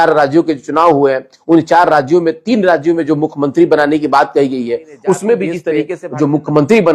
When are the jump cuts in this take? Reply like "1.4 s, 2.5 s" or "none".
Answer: 5.9 s